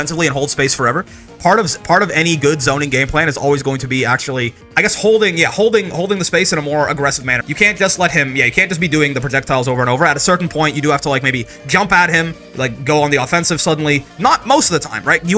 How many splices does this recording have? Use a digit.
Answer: 2